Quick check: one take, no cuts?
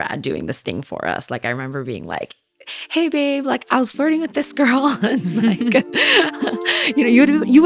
yes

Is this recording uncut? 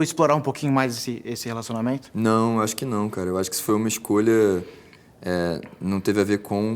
no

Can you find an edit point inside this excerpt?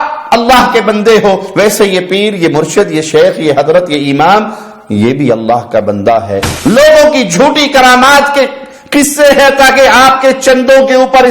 yes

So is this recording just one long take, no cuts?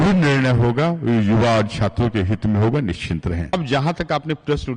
no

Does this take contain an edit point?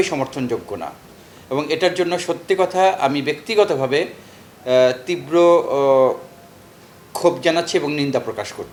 no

